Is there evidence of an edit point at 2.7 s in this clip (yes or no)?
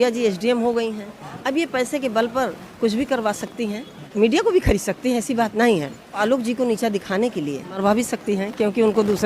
no